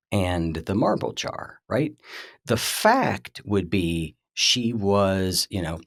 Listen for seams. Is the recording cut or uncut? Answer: uncut